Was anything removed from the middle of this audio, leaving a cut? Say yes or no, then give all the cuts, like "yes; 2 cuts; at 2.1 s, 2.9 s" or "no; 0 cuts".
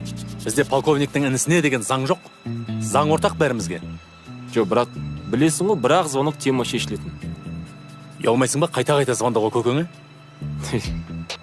no; 0 cuts